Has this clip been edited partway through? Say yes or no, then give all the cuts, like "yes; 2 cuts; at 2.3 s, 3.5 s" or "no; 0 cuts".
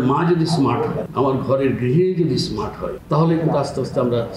yes; 2 cuts; at 1.0 s, 2.9 s